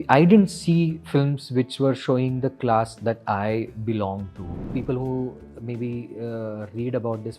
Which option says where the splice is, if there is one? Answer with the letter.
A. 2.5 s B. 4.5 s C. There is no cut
B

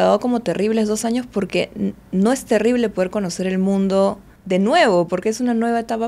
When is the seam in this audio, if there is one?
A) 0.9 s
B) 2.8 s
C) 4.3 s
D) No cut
C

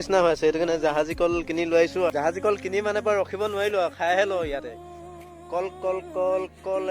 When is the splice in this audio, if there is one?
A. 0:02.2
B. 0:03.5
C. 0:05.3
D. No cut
D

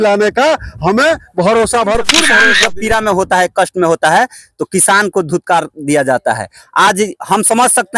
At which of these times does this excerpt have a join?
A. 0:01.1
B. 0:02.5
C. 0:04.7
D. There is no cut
B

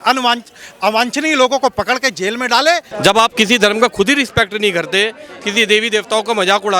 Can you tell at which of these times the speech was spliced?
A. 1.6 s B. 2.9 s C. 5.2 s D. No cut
B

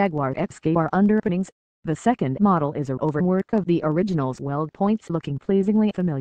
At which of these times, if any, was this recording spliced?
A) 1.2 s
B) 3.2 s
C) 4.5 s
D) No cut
D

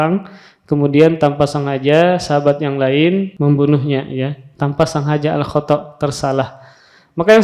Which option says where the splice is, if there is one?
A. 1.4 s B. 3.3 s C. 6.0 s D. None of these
B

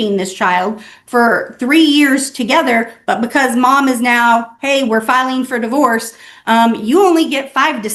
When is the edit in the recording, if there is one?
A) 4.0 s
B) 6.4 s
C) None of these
C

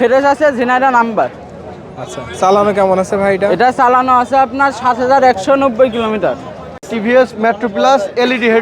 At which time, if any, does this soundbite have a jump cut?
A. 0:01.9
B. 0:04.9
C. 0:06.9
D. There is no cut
C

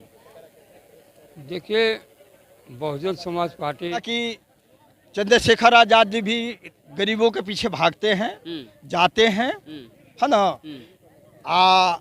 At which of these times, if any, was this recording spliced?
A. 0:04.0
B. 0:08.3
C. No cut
A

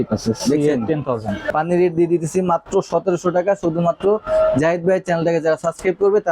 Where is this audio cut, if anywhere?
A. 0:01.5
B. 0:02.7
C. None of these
A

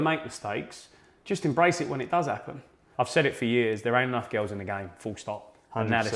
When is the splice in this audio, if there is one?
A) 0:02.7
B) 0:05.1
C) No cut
A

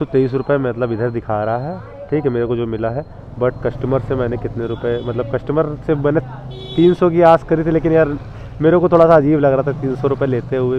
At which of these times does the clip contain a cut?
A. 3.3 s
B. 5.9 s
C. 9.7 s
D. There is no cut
D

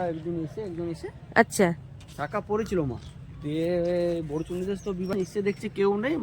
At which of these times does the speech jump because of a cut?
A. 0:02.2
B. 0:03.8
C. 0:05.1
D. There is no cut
C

